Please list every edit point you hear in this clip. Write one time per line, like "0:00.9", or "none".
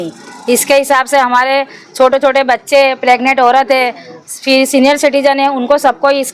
none

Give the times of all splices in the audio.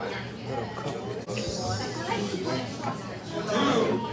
0:01.2

